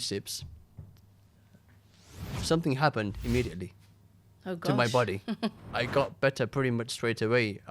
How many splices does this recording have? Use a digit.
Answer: 1